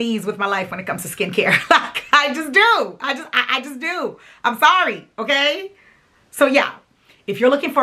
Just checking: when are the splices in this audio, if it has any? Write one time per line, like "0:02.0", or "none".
none